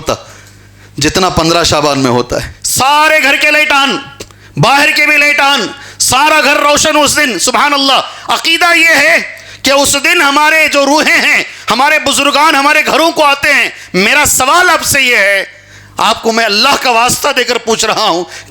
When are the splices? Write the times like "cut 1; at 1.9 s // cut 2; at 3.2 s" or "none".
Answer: cut 1; at 2.6 s